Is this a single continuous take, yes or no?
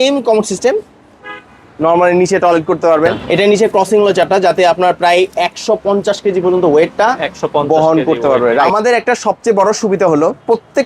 no